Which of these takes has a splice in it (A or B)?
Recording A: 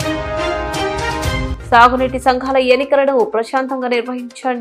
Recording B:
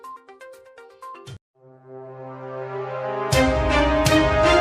A